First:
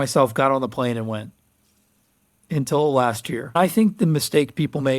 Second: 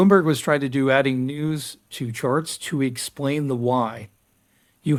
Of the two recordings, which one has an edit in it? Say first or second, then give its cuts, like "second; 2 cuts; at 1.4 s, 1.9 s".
first; 1 cut; at 3.5 s